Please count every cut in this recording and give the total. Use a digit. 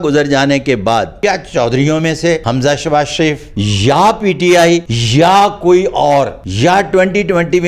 5